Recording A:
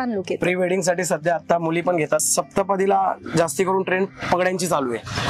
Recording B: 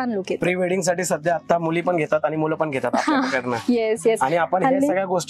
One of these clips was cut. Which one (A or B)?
A